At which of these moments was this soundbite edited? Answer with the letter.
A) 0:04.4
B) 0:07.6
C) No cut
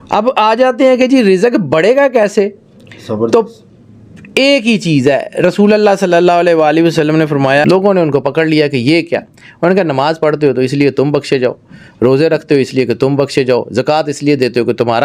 B